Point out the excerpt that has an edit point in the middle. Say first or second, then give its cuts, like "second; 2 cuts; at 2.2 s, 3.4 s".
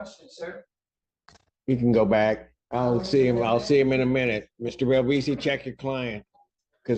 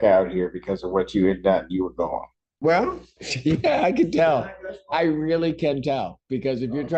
second; 1 cut; at 2.4 s